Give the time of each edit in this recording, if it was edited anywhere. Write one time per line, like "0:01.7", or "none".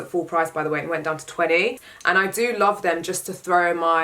0:01.8

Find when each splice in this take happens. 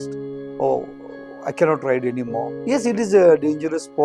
0:02.5

